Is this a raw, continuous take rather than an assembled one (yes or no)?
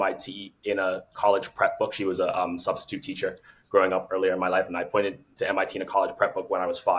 yes